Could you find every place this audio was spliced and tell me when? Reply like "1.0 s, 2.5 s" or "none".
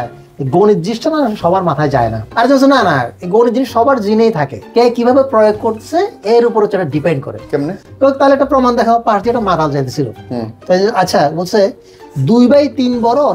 2.2 s, 4.5 s